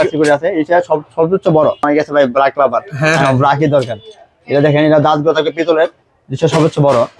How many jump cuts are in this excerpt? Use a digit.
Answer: 1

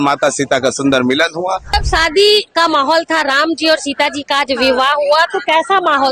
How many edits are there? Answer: 1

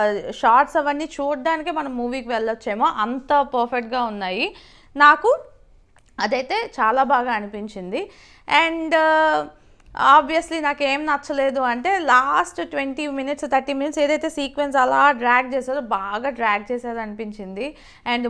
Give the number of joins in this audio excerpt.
0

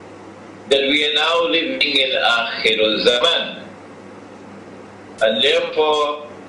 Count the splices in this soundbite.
1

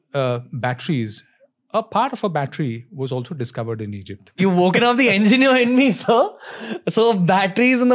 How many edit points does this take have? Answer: 1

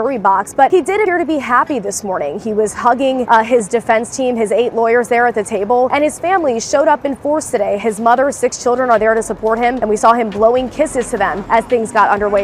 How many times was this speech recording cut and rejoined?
5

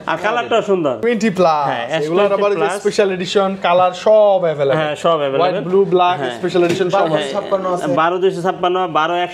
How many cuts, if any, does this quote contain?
1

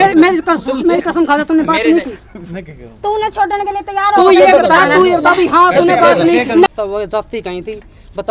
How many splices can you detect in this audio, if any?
1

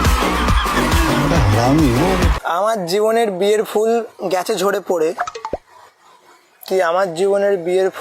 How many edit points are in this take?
1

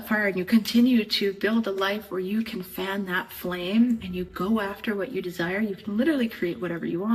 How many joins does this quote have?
0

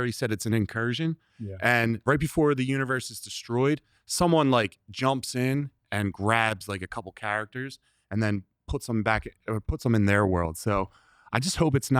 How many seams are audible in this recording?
1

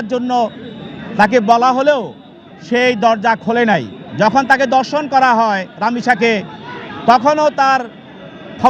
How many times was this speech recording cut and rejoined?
1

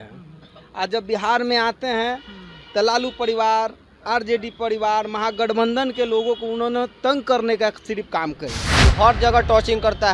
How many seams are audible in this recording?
1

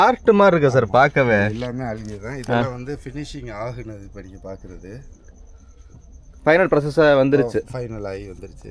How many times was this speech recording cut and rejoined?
0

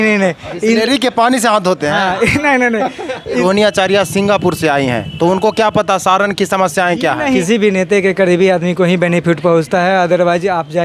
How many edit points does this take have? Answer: 2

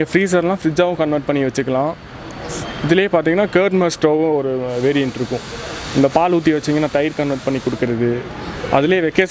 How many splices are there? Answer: 0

